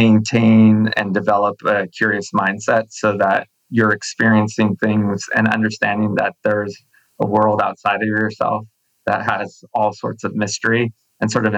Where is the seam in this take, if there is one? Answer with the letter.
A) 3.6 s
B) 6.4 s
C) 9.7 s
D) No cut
D